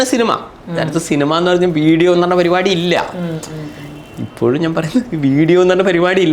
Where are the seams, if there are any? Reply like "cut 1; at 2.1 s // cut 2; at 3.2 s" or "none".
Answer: none